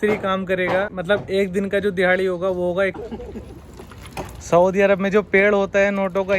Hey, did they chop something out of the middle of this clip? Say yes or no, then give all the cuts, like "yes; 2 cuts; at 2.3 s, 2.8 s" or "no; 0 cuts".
yes; 2 cuts; at 1.0 s, 3.0 s